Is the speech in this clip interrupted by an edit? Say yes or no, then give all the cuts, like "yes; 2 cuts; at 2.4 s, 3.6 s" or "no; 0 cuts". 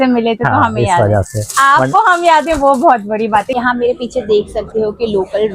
yes; 1 cut; at 3.5 s